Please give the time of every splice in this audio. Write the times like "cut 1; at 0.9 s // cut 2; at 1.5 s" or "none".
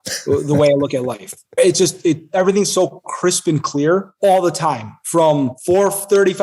cut 1; at 1.6 s // cut 2; at 4.1 s // cut 3; at 5.6 s